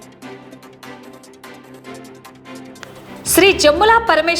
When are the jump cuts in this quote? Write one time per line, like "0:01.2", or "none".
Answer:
0:01.3